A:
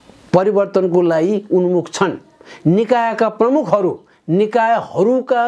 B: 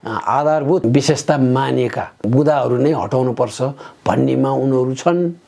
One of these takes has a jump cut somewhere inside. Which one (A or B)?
B